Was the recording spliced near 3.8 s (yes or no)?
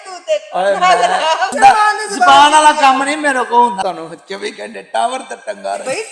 yes